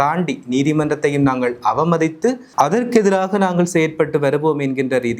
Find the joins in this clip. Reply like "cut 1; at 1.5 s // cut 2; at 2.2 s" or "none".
cut 1; at 2.4 s

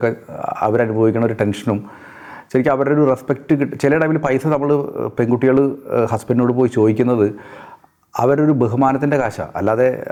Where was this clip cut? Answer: none

